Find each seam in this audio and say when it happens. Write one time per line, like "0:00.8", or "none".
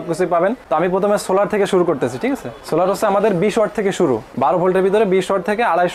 none